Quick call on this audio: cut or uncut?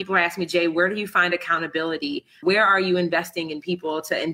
cut